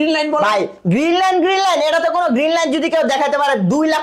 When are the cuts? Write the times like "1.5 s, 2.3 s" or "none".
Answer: none